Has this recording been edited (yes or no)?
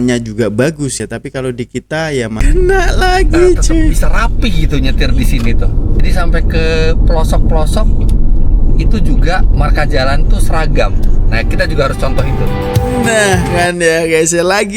yes